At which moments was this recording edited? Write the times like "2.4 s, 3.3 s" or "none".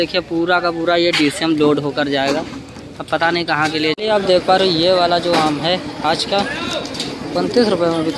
3.9 s